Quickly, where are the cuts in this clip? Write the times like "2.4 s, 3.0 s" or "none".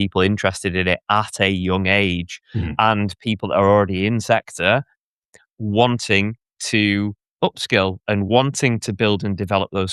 none